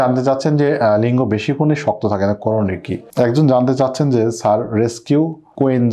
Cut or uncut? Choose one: cut